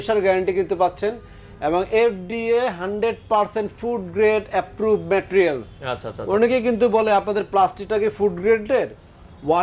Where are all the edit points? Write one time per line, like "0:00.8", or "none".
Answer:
none